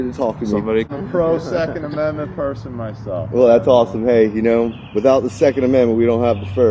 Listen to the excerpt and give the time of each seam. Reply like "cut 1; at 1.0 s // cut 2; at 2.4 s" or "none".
cut 1; at 0.9 s